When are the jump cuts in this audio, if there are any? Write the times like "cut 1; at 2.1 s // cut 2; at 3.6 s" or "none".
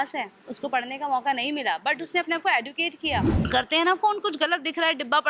cut 1; at 3.4 s